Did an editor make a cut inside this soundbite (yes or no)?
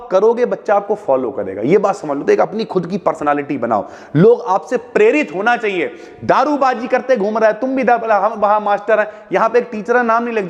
no